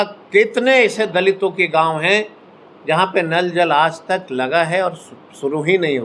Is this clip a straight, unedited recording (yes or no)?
yes